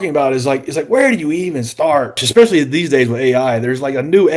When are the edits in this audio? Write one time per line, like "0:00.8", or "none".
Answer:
0:02.2